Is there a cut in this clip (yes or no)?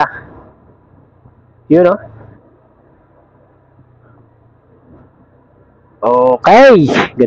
no